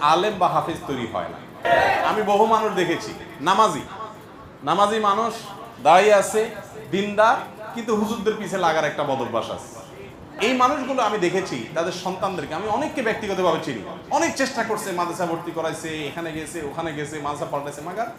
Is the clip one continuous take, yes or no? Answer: no